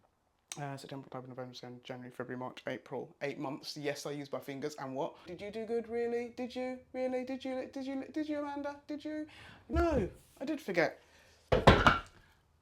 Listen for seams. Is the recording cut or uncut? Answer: cut